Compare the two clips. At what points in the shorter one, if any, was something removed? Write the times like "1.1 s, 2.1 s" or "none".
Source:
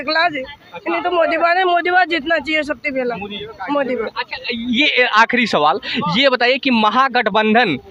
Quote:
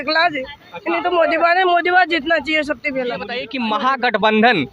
3.5 s